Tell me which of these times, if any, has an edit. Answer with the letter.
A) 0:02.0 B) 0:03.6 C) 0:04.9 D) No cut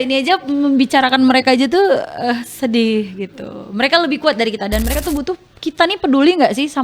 C